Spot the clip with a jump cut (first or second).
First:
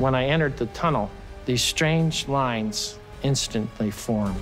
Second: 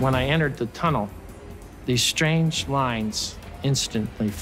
first